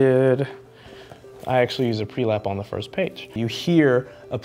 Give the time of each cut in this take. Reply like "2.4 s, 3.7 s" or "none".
3.3 s